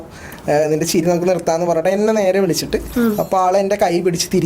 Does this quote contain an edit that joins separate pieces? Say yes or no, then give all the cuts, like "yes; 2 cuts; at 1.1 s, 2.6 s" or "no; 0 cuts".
yes; 1 cut; at 2.9 s